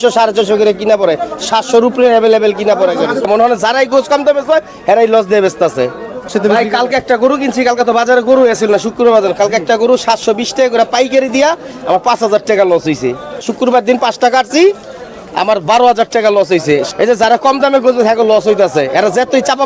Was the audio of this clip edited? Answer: yes; 4 cuts; at 3.3 s, 6.3 s, 13.5 s, 16.9 s

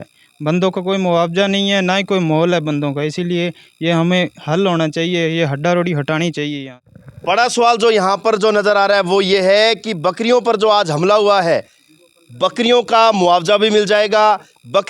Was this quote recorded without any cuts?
yes; 0 cuts

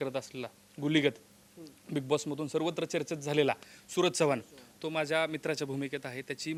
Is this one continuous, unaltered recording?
yes; 0 cuts

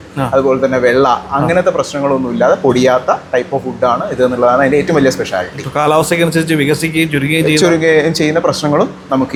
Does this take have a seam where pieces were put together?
no; 0 cuts

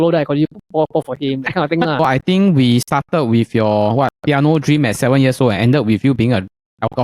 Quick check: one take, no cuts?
no; 1 cut; at 2.1 s

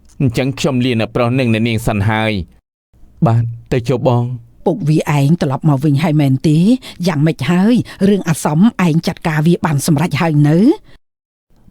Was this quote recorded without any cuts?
no; 1 cut; at 4.4 s

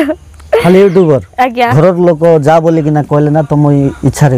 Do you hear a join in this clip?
yes; 1 cut; at 1.7 s

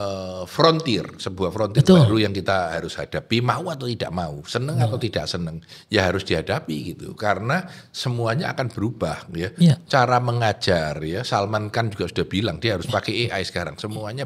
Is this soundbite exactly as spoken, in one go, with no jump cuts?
yes; 0 cuts

